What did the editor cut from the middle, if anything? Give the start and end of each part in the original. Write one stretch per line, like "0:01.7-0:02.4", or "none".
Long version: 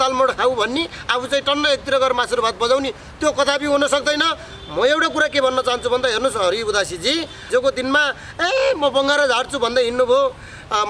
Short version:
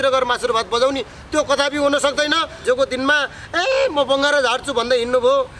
0:04.4-0:07.4